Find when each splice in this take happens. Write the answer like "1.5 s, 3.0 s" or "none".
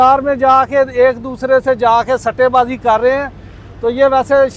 none